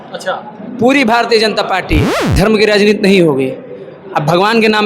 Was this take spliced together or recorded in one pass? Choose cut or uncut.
cut